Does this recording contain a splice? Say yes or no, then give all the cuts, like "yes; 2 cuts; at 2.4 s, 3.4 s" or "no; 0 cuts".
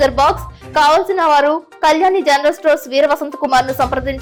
no; 0 cuts